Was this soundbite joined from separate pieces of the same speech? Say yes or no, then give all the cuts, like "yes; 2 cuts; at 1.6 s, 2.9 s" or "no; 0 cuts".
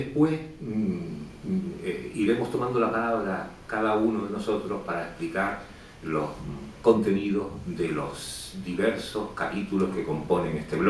no; 0 cuts